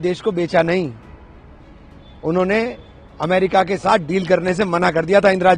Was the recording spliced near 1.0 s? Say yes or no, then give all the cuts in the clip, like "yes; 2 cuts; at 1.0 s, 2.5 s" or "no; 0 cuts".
no; 0 cuts